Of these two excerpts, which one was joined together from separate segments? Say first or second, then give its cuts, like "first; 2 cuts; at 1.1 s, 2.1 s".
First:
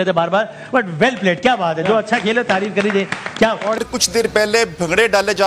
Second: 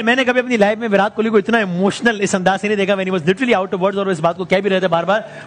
first; 1 cut; at 3.8 s